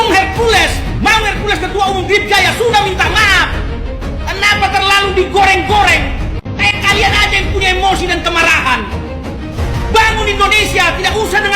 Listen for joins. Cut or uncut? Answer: uncut